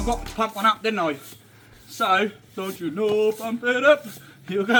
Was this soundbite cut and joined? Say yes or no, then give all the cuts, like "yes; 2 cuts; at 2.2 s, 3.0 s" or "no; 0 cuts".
no; 0 cuts